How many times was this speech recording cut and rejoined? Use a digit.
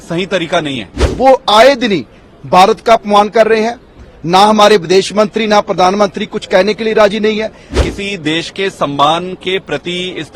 2